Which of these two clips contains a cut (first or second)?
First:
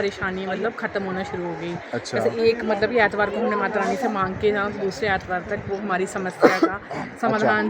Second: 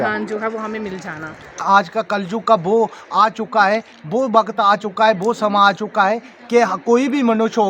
second